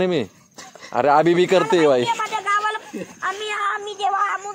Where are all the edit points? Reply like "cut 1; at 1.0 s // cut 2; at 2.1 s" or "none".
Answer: none